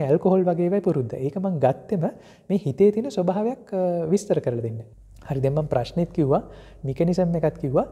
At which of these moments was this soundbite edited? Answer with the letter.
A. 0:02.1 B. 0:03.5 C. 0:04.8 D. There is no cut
C